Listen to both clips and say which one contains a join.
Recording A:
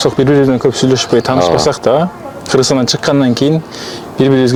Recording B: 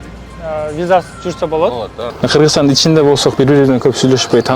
B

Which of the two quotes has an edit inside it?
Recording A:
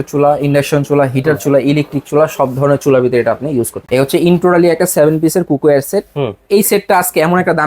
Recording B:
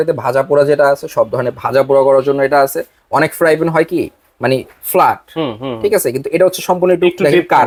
A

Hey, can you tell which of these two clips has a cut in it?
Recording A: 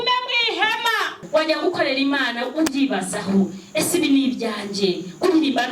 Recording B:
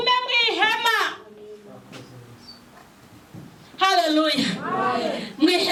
A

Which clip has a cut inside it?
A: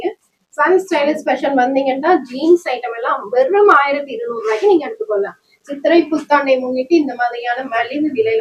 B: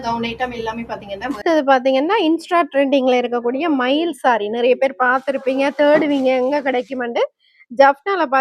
B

